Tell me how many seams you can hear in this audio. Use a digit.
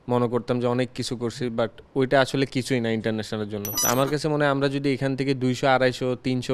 1